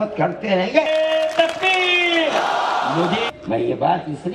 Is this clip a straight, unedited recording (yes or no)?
yes